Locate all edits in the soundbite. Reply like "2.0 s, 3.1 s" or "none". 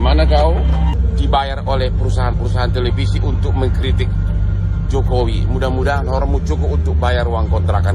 0.9 s